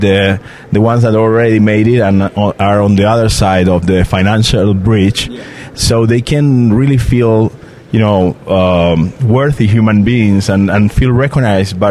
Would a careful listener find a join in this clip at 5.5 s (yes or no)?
no